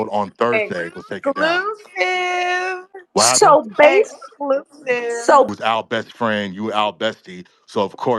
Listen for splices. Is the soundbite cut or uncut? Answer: cut